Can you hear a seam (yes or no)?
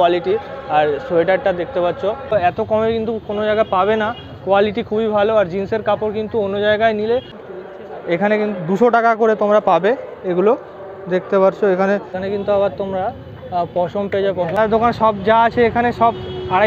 yes